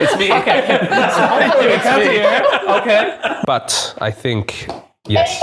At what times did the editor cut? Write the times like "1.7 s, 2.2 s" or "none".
3.4 s